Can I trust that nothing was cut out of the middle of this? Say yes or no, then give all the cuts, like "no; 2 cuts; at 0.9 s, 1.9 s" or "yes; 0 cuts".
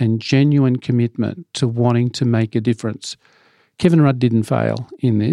yes; 0 cuts